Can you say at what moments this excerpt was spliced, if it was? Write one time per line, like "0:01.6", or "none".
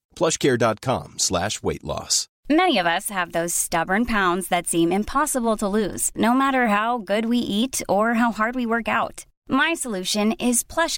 none